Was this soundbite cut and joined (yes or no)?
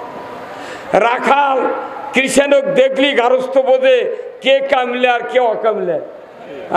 no